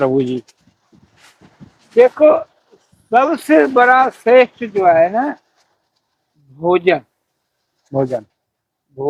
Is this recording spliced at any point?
no; 0 cuts

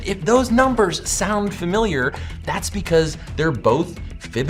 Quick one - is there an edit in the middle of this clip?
no; 0 cuts

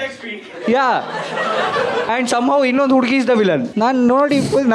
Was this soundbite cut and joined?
yes; 2 cuts; at 2.1 s, 3.7 s

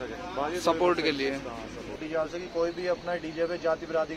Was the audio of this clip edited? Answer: yes; 1 cut; at 2.0 s

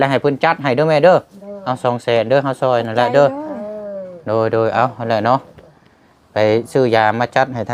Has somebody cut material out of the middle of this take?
no; 0 cuts

